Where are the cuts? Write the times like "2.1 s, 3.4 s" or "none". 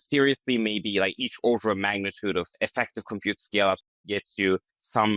2.5 s, 3.9 s

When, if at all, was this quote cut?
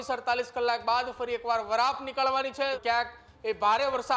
2.8 s

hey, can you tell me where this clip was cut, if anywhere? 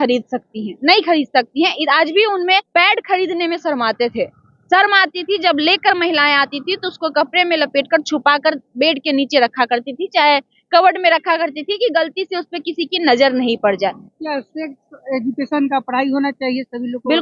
2.7 s, 14.0 s

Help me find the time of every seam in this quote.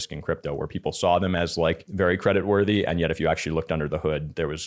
1.9 s

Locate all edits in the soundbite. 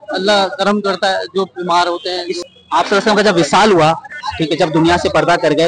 2.4 s

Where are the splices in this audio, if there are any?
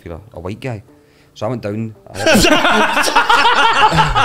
none

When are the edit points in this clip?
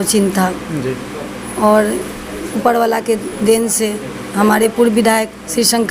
none

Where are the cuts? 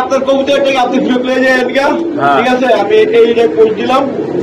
none

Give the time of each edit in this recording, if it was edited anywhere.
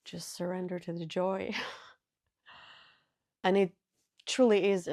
3.3 s

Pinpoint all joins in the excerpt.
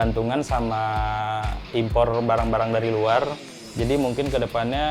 1.6 s

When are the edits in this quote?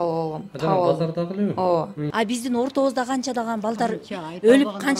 2.0 s

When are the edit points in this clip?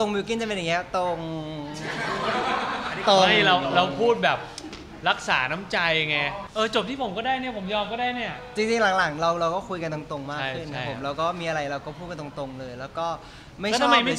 6.4 s

